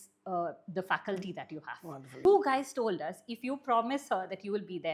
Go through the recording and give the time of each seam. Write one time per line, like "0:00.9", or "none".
0:02.2